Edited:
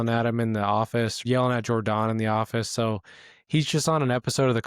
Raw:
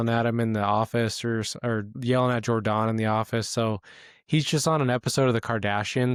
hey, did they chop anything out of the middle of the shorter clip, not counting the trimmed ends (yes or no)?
yes